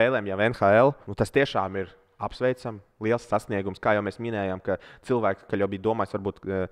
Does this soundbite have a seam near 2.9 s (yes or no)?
no